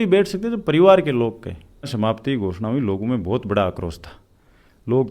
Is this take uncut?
no; 1 cut; at 1.9 s

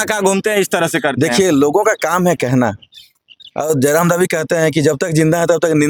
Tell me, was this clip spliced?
no; 0 cuts

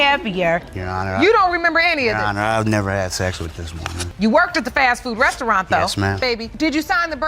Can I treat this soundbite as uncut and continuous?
no; 1 cut; at 6.2 s

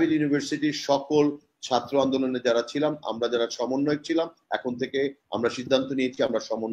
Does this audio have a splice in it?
no; 0 cuts

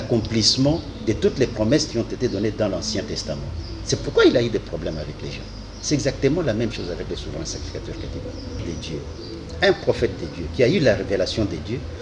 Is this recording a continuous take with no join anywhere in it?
no; 1 cut; at 8.7 s

